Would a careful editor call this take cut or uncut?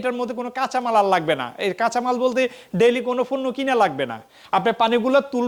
uncut